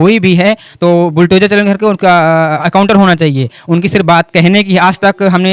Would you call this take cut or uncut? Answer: uncut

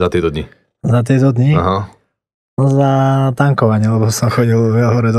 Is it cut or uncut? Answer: uncut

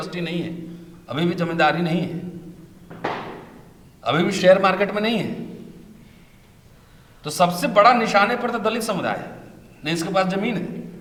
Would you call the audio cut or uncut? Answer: uncut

